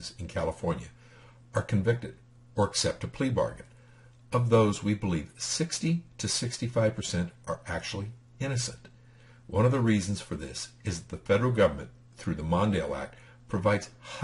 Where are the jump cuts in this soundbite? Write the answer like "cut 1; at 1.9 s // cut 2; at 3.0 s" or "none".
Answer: cut 1; at 1.4 s